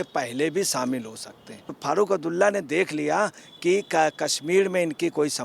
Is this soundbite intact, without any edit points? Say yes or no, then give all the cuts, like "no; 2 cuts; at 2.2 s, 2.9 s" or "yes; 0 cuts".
no; 1 cut; at 1.8 s